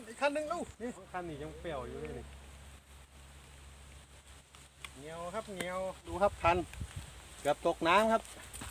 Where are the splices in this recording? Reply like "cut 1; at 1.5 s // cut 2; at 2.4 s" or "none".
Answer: cut 1; at 1.0 s // cut 2; at 6.1 s